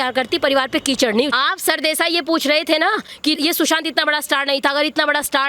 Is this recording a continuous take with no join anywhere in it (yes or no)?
no